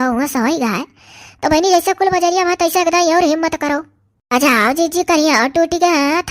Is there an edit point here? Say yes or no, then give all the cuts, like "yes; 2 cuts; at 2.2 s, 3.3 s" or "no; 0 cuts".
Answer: no; 0 cuts